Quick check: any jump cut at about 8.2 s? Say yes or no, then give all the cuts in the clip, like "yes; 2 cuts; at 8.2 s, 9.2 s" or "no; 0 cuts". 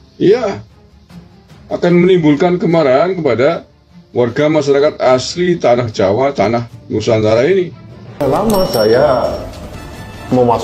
yes; 1 cut; at 8.2 s